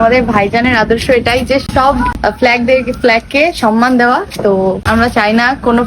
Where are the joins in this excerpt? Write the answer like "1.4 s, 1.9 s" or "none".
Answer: 1.7 s, 4.8 s